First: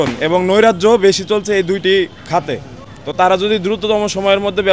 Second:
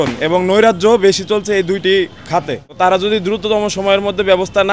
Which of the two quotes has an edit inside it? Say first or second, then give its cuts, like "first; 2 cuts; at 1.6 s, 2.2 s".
second; 1 cut; at 2.6 s